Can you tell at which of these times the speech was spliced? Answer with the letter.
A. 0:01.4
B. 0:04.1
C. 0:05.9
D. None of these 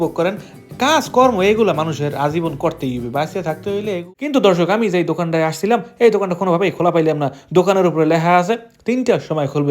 B